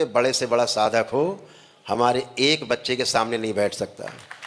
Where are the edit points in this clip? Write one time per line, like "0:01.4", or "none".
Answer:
none